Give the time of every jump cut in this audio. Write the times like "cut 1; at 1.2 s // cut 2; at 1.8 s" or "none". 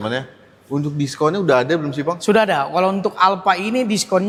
none